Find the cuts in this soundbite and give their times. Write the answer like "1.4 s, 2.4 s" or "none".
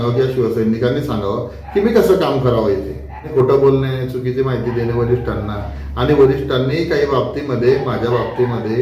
3.3 s